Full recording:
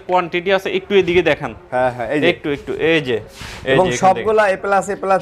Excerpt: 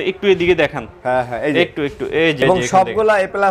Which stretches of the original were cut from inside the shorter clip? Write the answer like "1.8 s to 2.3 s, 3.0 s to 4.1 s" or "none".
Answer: 3.0 s to 3.7 s

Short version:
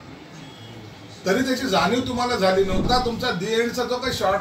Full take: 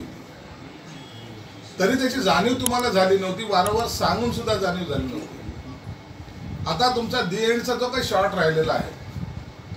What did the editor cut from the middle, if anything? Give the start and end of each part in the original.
3.4 s to 6.7 s

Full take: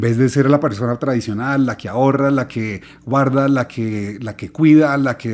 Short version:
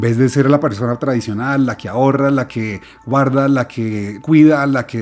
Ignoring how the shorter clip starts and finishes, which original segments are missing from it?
4.1 s to 4.4 s

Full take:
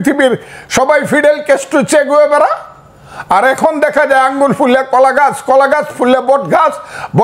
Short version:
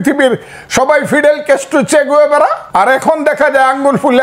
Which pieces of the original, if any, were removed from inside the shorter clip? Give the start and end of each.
2.6 s to 3.2 s

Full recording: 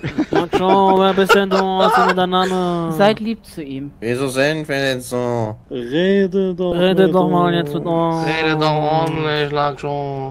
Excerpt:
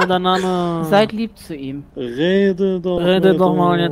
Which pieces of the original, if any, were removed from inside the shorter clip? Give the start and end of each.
3.9 s to 5.6 s

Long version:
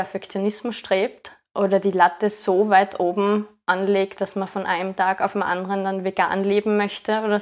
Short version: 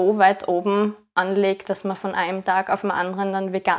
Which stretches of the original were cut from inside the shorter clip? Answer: none

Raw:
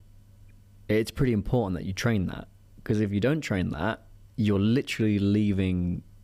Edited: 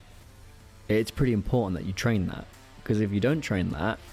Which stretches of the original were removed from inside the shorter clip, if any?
none

